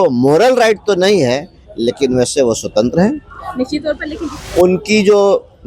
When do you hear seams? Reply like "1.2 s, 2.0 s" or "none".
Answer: 4.1 s